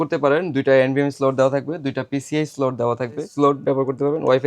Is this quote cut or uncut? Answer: cut